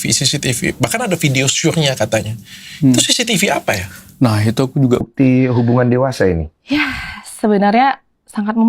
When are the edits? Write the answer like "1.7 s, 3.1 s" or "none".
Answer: 5.1 s